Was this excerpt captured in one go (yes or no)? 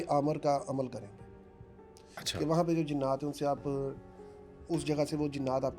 yes